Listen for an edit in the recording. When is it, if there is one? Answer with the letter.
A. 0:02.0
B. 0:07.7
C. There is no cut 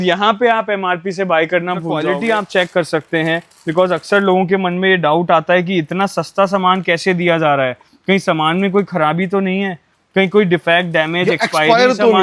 A